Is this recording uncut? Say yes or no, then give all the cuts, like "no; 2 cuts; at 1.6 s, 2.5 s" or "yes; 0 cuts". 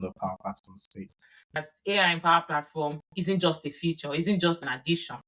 no; 1 cut; at 1.5 s